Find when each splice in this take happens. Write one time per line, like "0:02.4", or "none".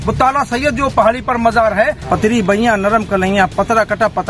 0:02.1